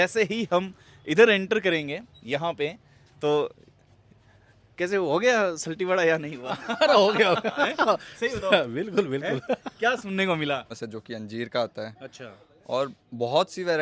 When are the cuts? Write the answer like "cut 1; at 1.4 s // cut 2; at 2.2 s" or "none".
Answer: cut 1; at 10.7 s